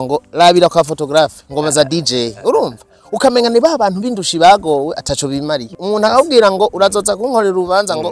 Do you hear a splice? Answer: yes; 1 cut; at 5.7 s

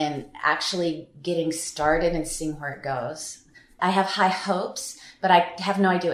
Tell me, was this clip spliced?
no; 0 cuts

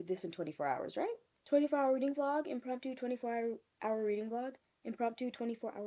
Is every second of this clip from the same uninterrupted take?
yes; 0 cuts

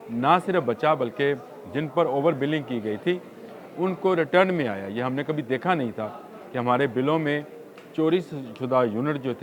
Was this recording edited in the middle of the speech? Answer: no; 0 cuts

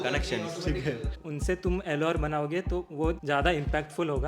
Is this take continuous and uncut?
no; 1 cut; at 1.3 s

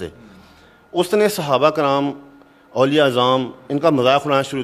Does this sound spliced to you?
no; 0 cuts

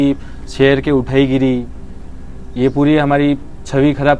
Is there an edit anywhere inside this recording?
no; 0 cuts

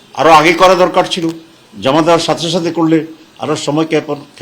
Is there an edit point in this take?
no; 0 cuts

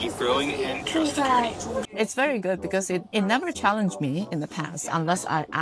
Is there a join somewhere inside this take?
yes; 1 cut; at 1.9 s

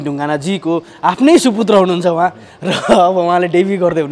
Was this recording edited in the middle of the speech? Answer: no; 0 cuts

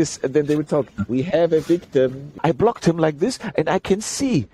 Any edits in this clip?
yes; 1 cut; at 2.3 s

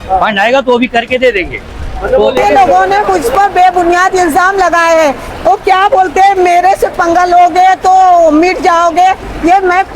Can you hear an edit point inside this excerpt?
yes; 1 cut; at 2.4 s

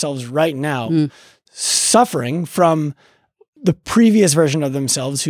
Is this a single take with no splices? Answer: no; 1 cut; at 3.5 s

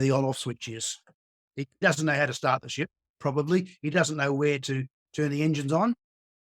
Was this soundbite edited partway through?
yes; 1 cut; at 1.8 s

